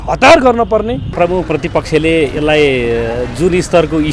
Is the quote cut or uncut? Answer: cut